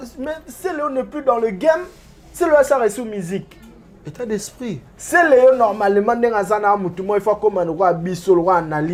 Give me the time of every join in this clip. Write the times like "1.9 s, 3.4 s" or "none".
none

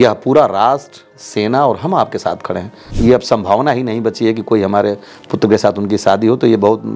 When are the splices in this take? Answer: 2.8 s

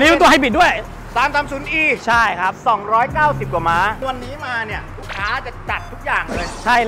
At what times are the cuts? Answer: 4.0 s

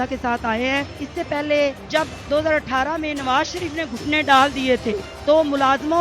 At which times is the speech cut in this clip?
1.0 s, 1.8 s, 5.1 s

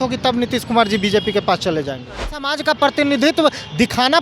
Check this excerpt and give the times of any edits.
2.5 s

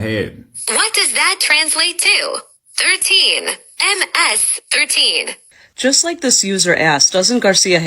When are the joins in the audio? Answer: 5.7 s

